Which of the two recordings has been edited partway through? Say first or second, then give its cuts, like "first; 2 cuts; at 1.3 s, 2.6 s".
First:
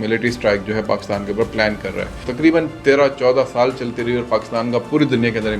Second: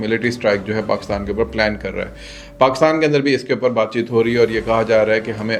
first; 1 cut; at 2.3 s